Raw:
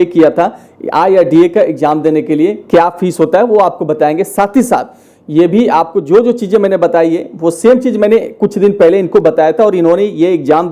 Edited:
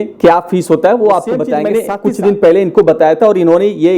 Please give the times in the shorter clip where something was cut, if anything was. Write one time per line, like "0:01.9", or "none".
0:01.7